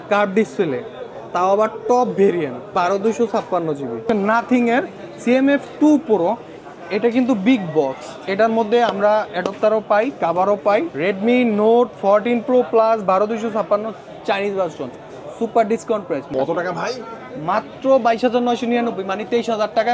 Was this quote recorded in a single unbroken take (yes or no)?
no